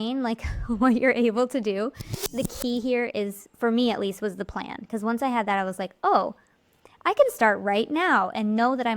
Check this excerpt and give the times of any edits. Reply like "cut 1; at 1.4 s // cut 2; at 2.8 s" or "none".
cut 1; at 2.2 s